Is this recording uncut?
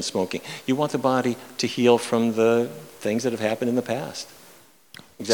yes; 0 cuts

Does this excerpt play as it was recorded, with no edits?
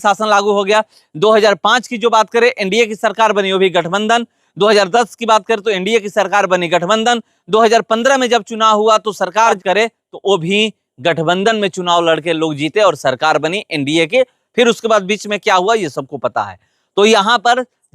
no; 1 cut; at 9.6 s

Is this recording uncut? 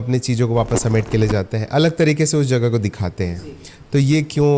yes; 0 cuts

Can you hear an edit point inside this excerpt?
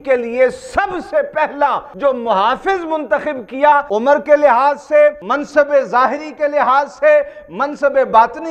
yes; 3 cuts; at 1.9 s, 3.9 s, 5.3 s

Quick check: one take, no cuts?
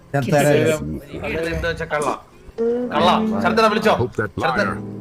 no; 1 cut; at 1.4 s

